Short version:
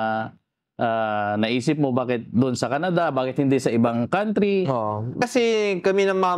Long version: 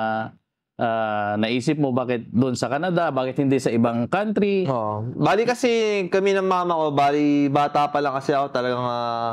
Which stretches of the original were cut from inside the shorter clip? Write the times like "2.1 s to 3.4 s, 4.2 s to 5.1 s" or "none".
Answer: 5.2 s to 5.5 s